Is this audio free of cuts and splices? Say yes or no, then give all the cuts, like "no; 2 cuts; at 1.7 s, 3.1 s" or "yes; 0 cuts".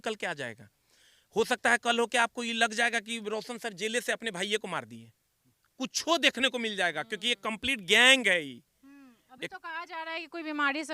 yes; 0 cuts